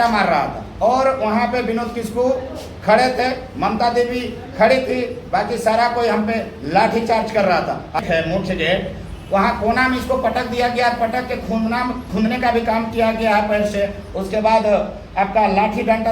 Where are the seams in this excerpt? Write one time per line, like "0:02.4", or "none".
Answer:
0:08.0